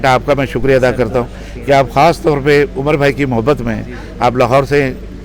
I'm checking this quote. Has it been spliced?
no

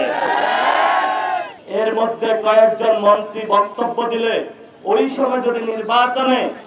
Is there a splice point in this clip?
yes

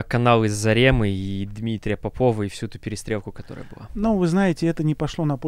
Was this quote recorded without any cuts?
yes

